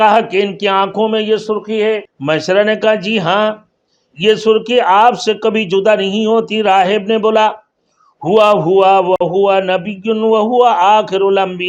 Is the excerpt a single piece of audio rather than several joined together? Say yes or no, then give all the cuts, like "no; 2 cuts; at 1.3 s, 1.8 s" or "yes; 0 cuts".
no; 1 cut; at 2.1 s